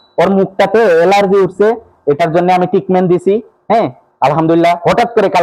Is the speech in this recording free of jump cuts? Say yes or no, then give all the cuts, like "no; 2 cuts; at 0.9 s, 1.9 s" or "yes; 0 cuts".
yes; 0 cuts